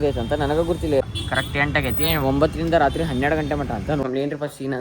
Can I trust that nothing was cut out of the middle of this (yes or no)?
no